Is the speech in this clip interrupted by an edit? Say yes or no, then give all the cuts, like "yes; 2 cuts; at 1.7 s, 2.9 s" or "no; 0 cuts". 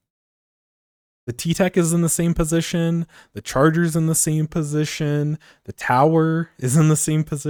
no; 0 cuts